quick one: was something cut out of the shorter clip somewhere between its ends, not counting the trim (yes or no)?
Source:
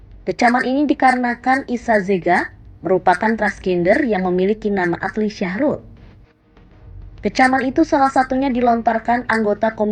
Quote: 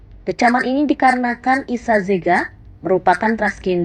no